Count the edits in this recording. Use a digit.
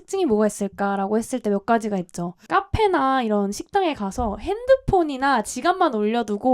1